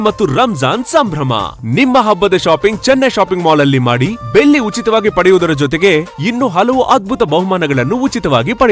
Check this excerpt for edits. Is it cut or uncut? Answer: uncut